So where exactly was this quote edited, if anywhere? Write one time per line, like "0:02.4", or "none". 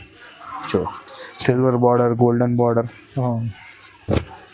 none